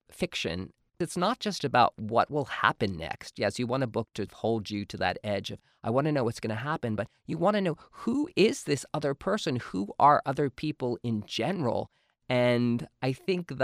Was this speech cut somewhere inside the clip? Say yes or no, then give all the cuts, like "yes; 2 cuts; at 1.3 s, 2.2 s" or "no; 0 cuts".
yes; 1 cut; at 0.9 s